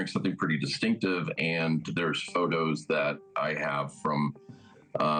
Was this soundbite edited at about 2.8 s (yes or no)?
no